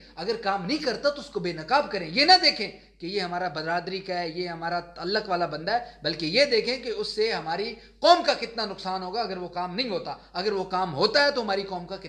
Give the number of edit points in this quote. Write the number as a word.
zero